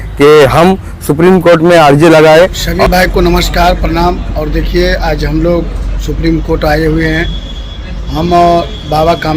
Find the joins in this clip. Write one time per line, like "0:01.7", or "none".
0:02.7